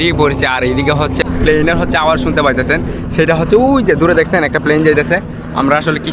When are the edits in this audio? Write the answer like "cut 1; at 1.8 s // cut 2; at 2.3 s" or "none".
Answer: none